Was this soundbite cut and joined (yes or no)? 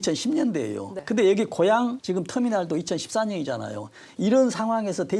yes